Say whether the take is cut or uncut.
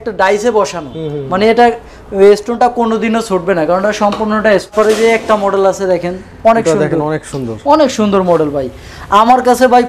cut